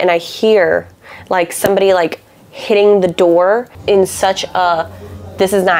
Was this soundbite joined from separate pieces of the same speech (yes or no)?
yes